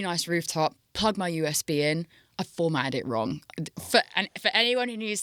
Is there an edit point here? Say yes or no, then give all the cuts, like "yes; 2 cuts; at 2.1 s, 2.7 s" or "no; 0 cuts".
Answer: no; 0 cuts